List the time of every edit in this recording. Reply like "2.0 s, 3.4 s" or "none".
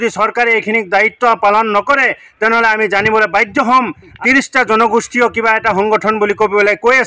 4.2 s